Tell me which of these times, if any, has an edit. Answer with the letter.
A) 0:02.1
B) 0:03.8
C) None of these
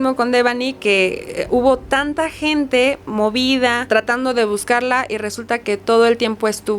B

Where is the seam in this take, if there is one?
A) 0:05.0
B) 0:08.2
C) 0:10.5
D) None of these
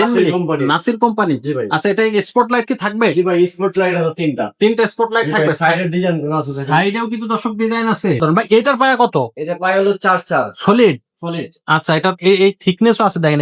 B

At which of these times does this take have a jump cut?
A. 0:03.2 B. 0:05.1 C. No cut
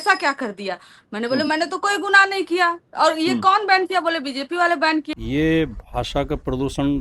B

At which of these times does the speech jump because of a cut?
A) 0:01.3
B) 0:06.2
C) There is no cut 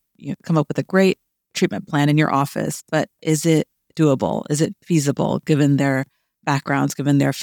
C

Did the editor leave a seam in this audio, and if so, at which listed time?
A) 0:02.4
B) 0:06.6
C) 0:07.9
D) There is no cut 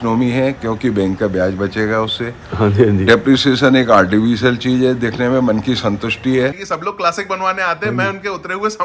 B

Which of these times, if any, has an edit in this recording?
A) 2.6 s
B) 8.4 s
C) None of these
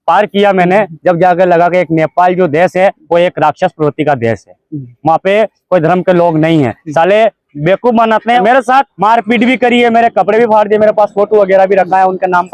B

